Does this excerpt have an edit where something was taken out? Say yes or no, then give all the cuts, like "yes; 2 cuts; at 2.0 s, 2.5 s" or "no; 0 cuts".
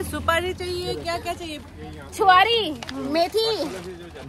no; 0 cuts